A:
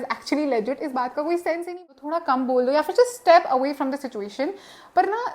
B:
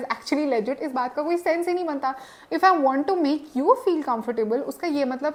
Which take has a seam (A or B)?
A